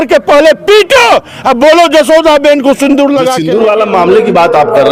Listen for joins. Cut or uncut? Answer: uncut